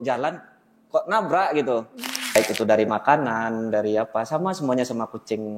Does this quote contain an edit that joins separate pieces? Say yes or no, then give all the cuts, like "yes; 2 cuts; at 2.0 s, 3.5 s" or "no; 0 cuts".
yes; 1 cut; at 2.3 s